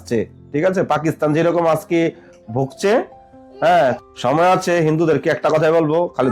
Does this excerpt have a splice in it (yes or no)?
yes